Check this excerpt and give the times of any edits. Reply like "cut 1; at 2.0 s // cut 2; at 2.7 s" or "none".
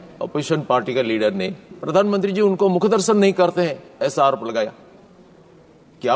cut 1; at 1.8 s